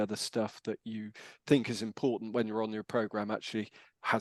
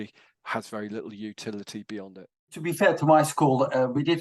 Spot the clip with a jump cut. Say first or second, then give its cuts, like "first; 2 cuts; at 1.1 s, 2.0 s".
second; 1 cut; at 2.7 s